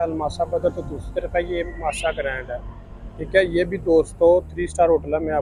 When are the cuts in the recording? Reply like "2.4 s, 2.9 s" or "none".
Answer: none